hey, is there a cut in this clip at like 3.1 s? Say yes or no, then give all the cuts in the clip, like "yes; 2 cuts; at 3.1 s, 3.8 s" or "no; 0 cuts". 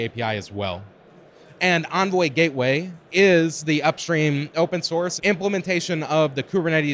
no; 1 cut; at 5.1 s